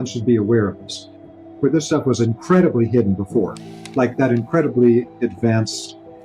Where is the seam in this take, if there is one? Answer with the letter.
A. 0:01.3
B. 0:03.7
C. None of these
A